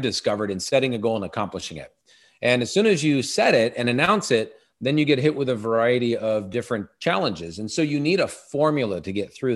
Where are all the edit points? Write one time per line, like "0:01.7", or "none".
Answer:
none